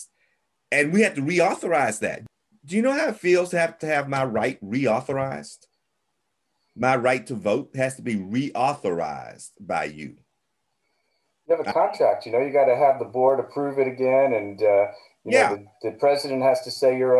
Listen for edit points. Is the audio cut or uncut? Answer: cut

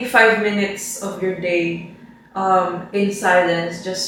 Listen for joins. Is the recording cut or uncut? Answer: uncut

